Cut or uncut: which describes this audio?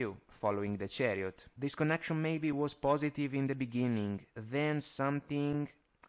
cut